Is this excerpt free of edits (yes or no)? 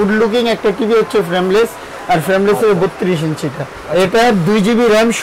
no